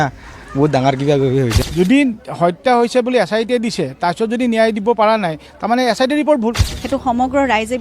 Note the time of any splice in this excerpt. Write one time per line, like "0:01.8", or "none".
0:01.6
0:06.7